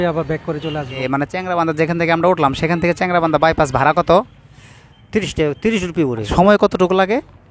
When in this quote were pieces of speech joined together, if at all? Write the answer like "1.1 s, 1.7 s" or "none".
1.0 s, 6.3 s